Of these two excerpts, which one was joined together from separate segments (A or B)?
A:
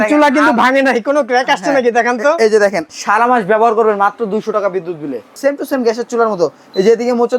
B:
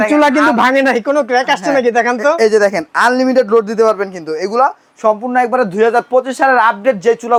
A